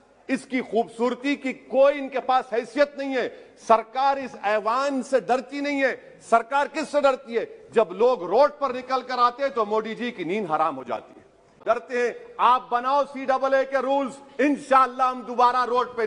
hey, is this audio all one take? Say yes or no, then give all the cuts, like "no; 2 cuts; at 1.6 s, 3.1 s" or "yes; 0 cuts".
no; 1 cut; at 11.6 s